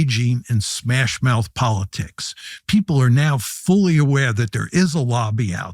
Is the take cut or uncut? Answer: uncut